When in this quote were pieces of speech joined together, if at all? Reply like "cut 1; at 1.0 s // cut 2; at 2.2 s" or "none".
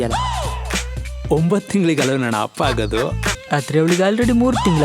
cut 1; at 3.3 s